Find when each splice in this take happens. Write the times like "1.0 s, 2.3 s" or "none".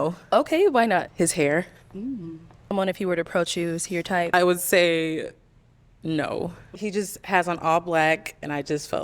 1.1 s, 2.7 s, 4.3 s, 6.7 s